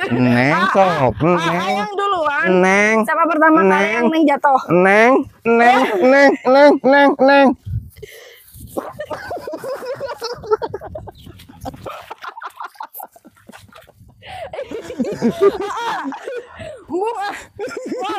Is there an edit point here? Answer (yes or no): no